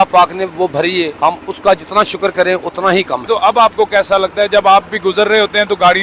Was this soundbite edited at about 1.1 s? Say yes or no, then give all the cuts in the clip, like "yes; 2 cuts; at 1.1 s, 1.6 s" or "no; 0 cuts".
yes; 2 cuts; at 1.1 s, 3.2 s